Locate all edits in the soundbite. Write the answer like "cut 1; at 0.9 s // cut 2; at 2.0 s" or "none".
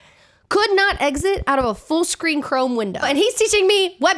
cut 1; at 3.0 s